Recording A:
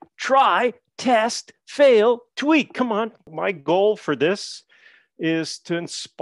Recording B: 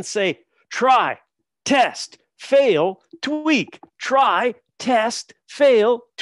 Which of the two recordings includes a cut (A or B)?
A